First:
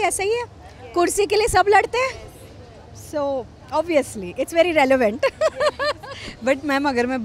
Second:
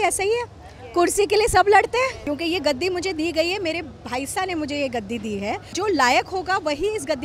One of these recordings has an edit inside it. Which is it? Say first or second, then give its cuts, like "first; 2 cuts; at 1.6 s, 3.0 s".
second; 2 cuts; at 2.2 s, 5.7 s